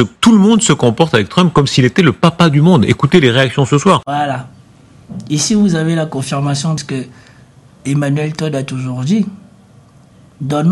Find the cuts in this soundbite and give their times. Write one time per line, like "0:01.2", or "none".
0:06.8